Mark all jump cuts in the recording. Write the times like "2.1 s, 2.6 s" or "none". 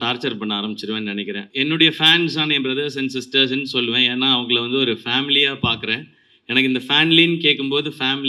1.5 s